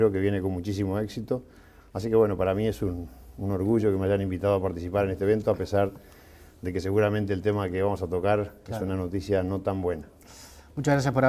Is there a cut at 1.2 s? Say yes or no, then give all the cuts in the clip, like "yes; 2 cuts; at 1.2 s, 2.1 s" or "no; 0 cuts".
yes; 1 cut; at 1.2 s